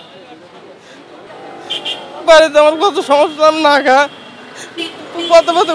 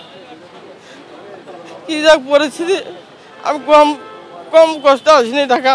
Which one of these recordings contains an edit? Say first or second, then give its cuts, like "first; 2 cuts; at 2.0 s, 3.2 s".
first; 1 cut; at 1.2 s